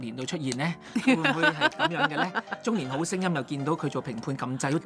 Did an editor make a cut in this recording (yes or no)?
no